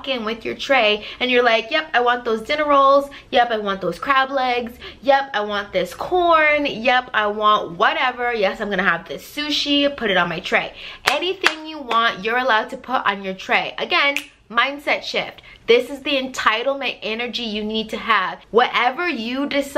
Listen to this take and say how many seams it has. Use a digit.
1